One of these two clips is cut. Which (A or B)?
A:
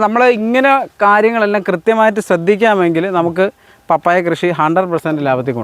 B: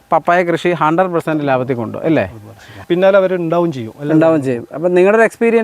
B